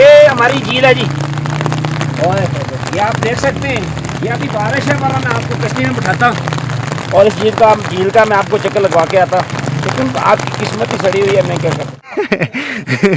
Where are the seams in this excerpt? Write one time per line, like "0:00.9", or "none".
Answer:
0:12.0